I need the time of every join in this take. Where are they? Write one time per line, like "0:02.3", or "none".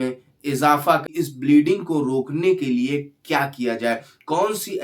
0:01.1